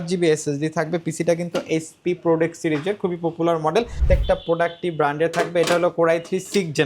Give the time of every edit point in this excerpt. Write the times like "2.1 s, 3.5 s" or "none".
4.0 s